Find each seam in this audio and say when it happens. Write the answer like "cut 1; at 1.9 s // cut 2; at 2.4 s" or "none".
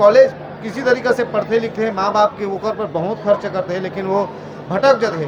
none